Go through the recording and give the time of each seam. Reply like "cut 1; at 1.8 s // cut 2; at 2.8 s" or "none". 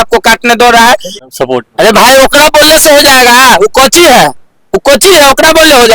cut 1; at 1.1 s